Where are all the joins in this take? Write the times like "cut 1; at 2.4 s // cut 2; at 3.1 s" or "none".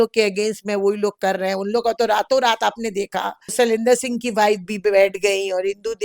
cut 1; at 3.4 s